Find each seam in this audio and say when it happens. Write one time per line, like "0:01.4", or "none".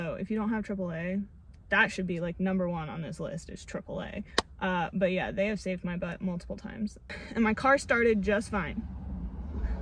0:07.2